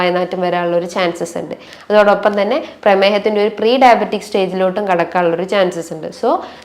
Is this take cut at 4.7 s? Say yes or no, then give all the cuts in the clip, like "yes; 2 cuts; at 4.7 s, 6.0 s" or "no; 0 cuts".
no; 1 cut; at 1.7 s